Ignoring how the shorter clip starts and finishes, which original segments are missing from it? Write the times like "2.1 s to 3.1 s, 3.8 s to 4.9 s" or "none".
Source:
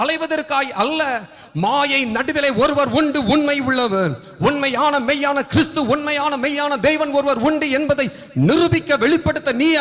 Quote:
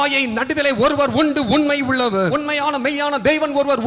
4.1 s to 5.9 s